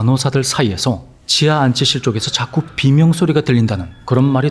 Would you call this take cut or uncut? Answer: uncut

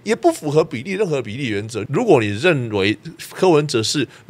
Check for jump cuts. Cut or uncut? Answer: cut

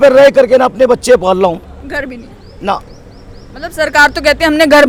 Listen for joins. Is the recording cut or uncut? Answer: uncut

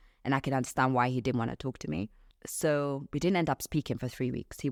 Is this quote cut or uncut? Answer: uncut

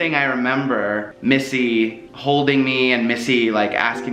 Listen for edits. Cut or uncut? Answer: cut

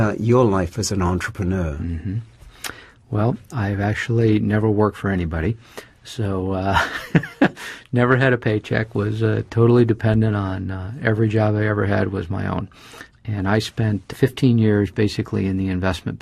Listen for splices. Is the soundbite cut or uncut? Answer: cut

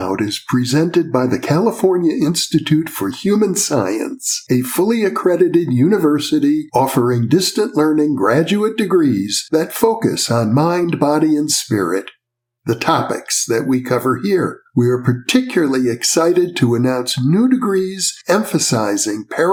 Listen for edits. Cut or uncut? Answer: uncut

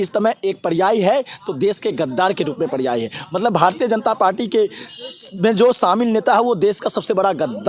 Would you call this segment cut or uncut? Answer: uncut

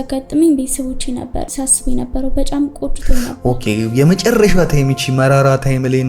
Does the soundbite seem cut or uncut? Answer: cut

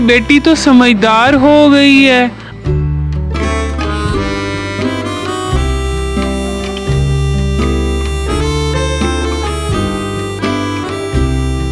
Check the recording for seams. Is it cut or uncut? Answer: uncut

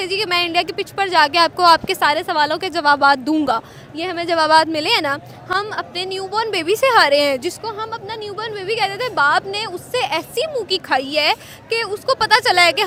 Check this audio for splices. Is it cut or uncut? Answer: uncut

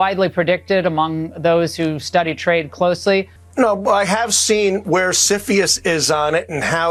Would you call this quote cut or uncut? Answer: uncut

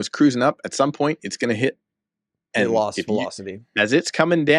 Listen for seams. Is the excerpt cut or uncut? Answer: uncut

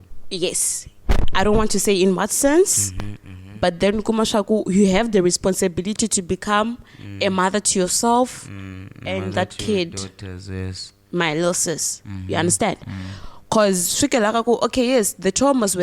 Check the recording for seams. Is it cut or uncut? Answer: uncut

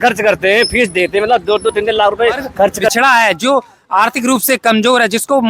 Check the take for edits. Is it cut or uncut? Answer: cut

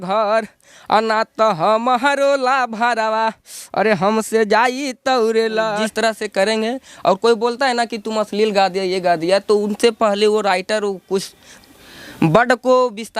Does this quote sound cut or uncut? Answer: cut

